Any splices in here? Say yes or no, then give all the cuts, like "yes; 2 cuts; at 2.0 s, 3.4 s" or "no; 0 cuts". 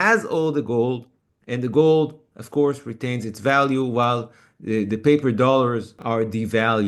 yes; 1 cut; at 6.0 s